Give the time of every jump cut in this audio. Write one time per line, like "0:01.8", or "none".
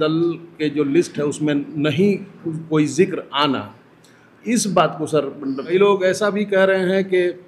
0:05.6